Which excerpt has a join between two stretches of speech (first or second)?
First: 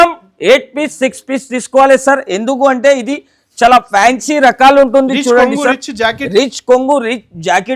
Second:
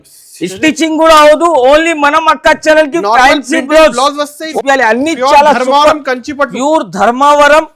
second